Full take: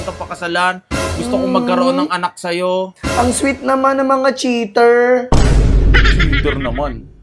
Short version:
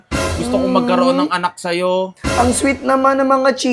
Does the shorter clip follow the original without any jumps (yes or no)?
yes